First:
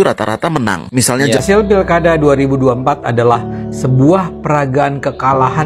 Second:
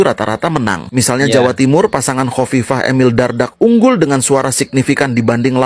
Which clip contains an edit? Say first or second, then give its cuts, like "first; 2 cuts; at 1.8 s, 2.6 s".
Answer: first; 1 cut; at 1.3 s